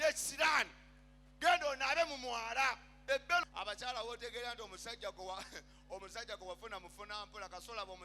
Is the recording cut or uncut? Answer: cut